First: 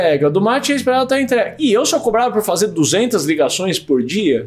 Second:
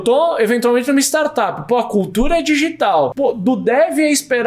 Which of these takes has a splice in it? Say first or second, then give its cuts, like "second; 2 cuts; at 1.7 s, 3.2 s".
second; 1 cut; at 3.1 s